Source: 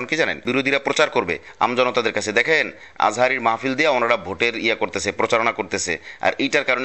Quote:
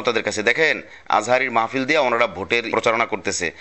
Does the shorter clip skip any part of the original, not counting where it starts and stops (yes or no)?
yes